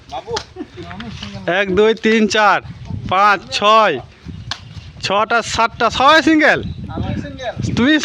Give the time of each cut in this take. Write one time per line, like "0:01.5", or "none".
none

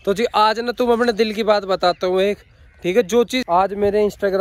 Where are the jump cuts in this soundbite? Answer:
0:03.4

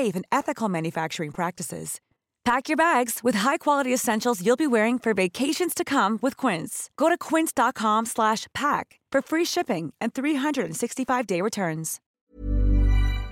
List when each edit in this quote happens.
0:12.1

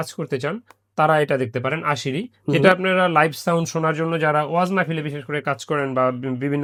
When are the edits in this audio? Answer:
none

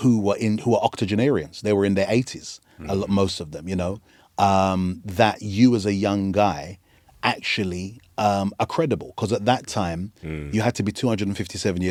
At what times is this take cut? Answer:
none

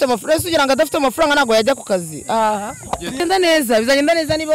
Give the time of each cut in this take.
0:03.2

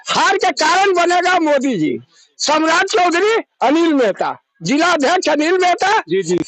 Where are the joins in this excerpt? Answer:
none

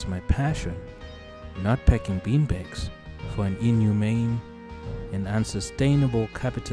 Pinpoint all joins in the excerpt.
none

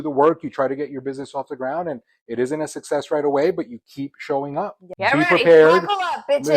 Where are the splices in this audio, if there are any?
0:04.9

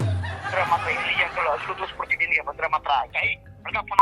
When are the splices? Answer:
0:03.1

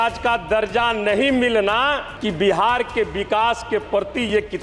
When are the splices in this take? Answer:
0:02.1

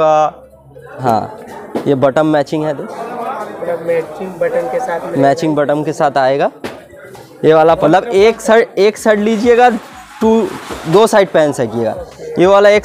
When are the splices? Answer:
0:01.0
0:07.8

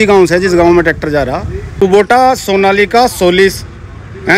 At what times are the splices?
0:01.7

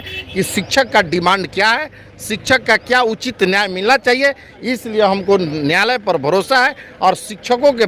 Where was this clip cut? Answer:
none

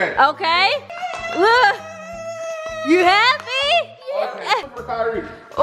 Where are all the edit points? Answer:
0:01.0
0:04.7

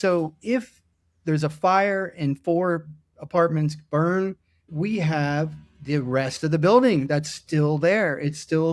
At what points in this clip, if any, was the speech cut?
none

